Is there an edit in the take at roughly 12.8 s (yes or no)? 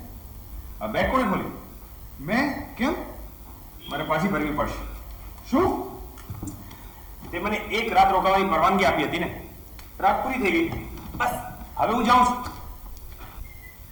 no